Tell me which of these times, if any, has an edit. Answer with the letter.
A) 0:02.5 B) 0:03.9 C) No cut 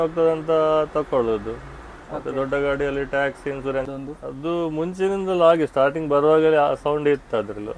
B